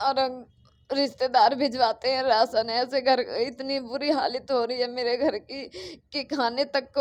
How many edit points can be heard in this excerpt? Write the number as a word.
zero